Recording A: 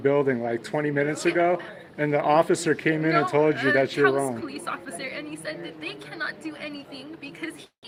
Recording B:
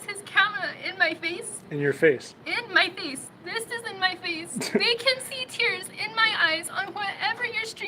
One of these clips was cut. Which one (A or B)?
B